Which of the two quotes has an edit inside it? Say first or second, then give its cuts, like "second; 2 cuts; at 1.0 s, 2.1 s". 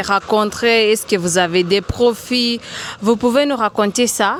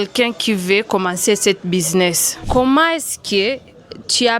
second; 1 cut; at 2.5 s